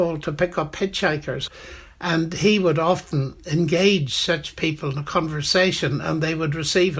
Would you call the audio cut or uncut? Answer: cut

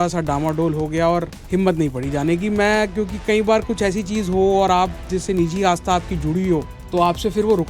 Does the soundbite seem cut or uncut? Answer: cut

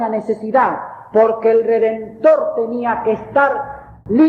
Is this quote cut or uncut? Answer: uncut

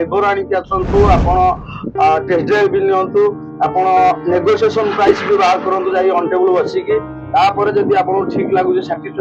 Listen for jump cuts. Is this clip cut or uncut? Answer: uncut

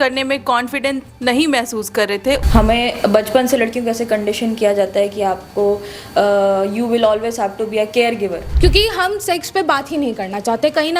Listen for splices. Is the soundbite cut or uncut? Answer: cut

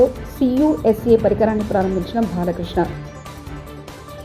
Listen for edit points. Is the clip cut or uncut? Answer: uncut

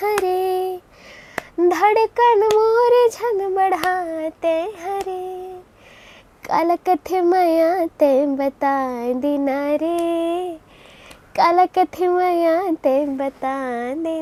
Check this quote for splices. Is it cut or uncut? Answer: uncut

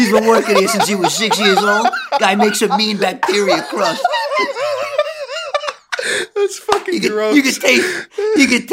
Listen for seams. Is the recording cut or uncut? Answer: uncut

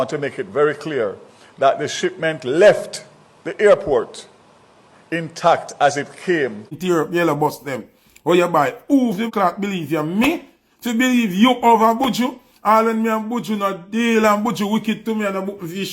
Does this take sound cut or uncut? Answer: cut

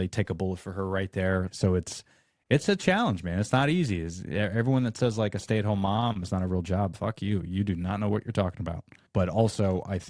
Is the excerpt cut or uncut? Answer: cut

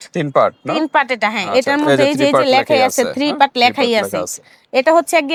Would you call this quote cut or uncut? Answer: uncut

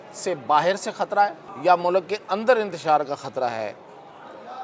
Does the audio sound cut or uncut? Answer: cut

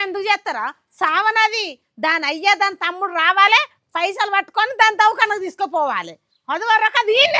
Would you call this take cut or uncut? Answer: uncut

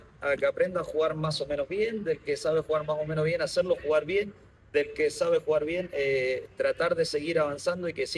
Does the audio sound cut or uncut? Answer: uncut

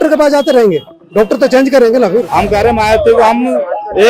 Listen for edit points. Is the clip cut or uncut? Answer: cut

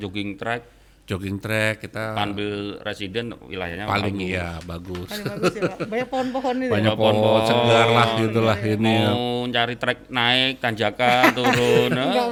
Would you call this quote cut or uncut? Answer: uncut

